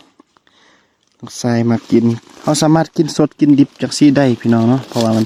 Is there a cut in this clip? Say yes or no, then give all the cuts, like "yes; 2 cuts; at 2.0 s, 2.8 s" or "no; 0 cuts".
no; 0 cuts